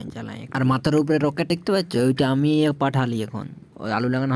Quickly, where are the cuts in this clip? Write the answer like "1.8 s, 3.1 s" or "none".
1.5 s